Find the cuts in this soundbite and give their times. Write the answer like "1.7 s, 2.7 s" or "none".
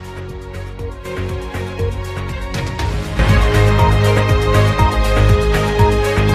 1.5 s